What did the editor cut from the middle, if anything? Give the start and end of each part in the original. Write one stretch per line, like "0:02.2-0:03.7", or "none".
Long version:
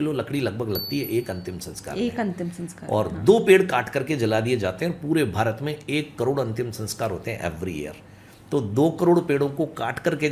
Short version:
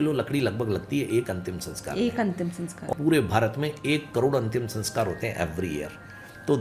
0:02.9-0:04.9